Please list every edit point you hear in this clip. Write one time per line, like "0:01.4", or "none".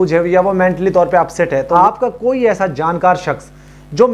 0:01.7

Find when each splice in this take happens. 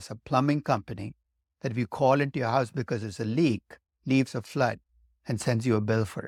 none

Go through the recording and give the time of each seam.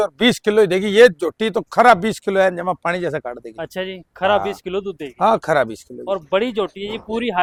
none

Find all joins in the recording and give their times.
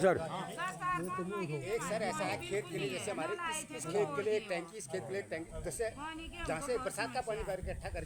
none

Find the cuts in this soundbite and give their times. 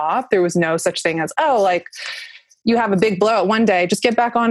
none

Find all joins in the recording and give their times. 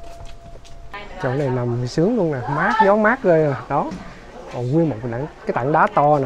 0:01.0

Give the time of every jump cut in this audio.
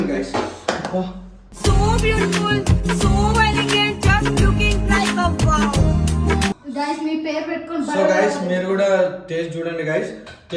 0:06.6

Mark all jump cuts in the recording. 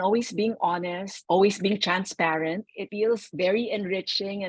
0:01.1
0:03.1

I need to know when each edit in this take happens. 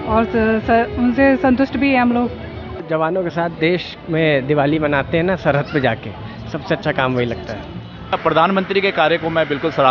0:02.8
0:08.1

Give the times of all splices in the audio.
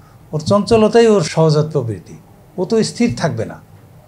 0:01.3

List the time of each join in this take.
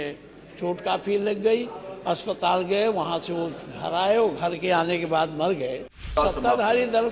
0:06.1

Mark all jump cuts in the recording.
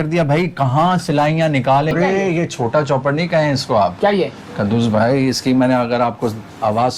0:01.9

